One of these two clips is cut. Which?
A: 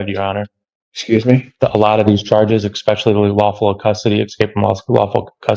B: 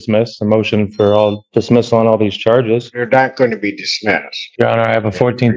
B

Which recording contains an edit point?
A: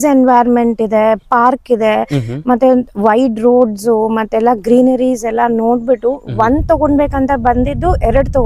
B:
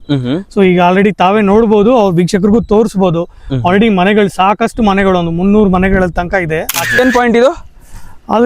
B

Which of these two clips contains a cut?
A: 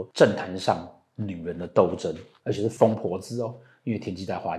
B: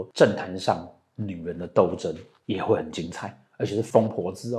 A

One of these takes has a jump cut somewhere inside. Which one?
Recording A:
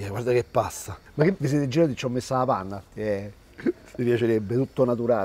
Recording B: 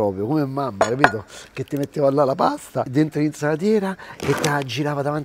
A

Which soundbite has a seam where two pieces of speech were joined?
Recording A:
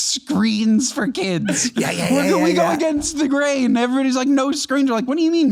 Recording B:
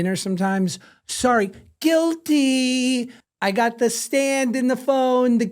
B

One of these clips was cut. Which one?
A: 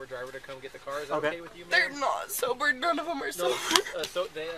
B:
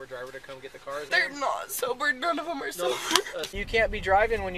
B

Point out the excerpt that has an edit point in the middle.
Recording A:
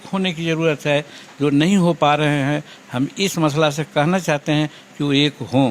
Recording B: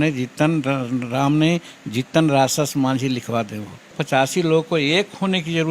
B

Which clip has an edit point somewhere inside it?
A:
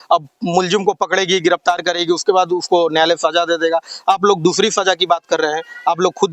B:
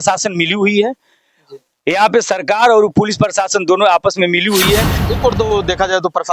B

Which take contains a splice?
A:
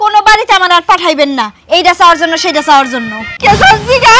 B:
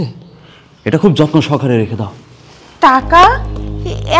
A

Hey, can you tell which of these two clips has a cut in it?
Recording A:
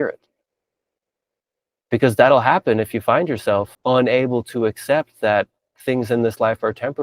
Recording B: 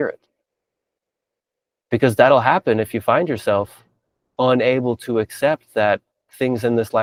A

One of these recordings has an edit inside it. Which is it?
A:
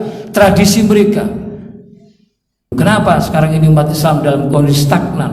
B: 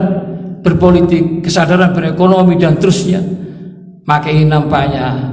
A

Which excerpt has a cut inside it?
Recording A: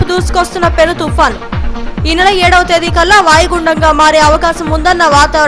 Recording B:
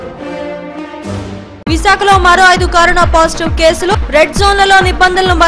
B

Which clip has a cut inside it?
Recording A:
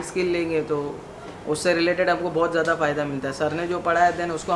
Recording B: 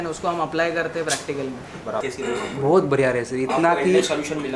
B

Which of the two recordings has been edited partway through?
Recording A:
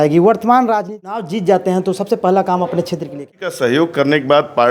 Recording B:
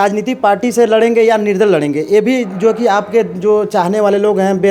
A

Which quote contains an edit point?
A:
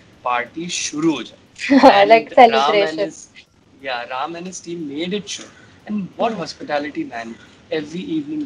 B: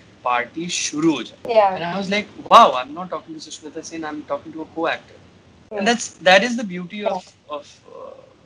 B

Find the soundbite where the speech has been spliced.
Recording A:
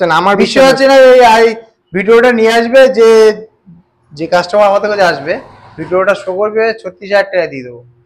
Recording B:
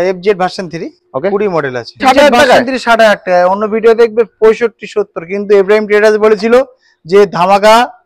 B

